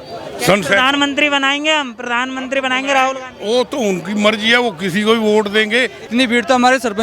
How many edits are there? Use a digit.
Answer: 1